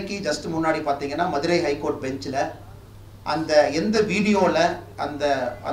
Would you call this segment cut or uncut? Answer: uncut